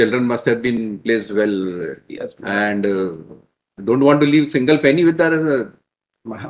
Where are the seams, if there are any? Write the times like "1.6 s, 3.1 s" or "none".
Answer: none